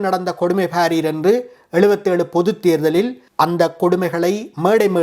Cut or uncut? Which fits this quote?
cut